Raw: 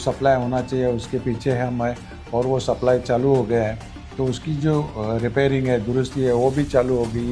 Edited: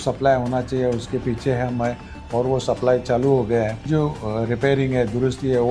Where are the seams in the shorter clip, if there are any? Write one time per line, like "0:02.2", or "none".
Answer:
0:03.8